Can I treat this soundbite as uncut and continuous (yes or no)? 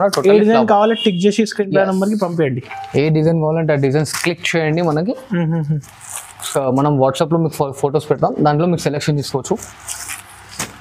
yes